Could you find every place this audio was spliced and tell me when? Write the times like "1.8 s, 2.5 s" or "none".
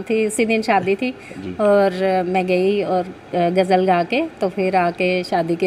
none